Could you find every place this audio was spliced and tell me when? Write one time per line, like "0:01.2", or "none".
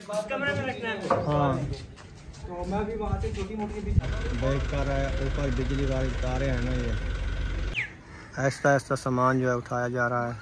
0:04.0
0:07.8